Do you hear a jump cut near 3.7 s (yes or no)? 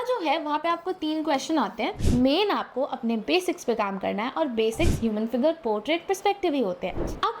no